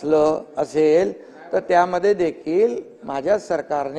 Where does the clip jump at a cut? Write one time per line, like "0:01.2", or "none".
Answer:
none